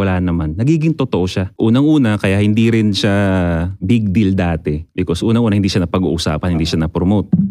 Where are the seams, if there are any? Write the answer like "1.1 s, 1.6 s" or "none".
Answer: 1.4 s